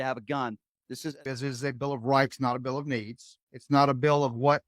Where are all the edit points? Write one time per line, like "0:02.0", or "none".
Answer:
0:01.2